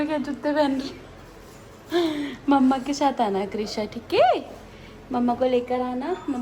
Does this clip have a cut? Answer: no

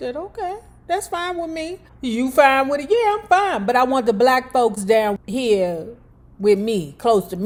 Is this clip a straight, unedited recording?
yes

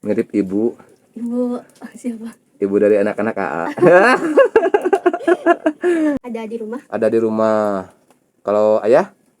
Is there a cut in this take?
yes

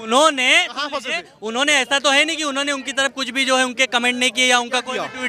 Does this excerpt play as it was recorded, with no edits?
yes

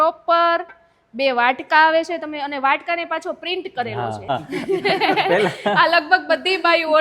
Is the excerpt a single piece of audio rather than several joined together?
no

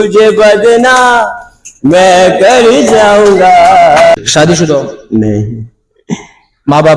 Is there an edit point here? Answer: yes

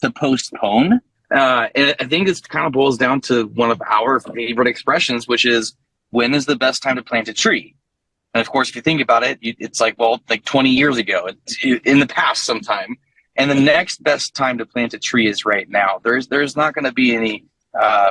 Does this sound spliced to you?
yes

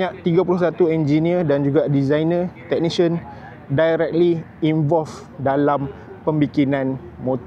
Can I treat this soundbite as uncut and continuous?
yes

